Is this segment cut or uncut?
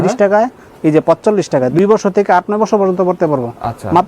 cut